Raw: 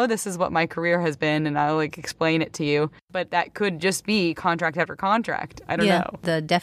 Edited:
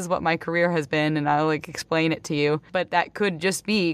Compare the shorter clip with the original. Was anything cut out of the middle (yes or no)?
yes